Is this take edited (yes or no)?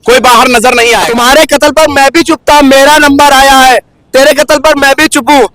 yes